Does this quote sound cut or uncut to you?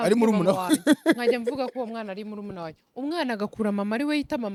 uncut